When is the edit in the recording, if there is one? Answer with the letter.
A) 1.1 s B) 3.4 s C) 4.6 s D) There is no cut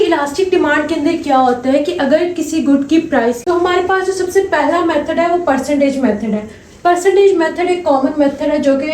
B